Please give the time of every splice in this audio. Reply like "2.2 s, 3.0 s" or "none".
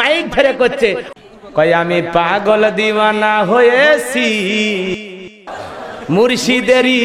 1.0 s